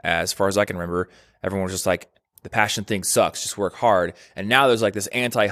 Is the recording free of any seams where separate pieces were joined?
yes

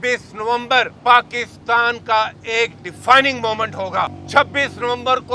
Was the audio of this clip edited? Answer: yes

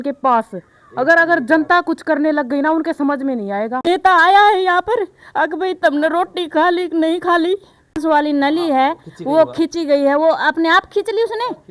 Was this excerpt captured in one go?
no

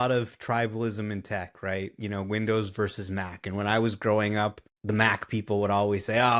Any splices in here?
yes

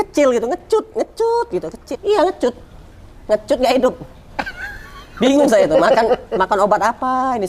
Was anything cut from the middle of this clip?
yes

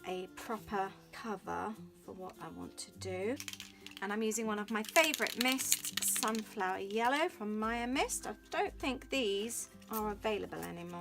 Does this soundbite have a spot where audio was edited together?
yes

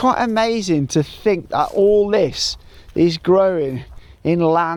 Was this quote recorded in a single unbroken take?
yes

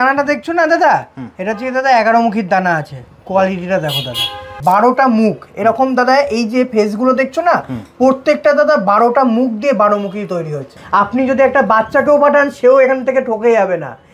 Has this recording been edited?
yes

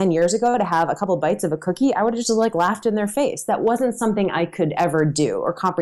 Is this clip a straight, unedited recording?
yes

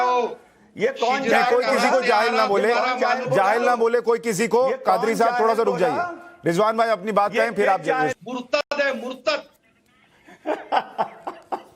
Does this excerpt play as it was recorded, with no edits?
no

